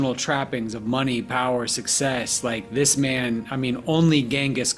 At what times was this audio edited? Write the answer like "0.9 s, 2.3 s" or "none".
none